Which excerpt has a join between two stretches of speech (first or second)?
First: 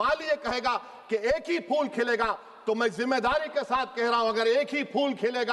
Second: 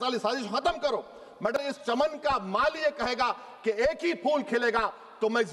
second